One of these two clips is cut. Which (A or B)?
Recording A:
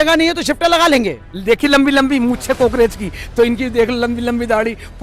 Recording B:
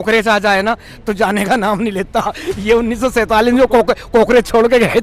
A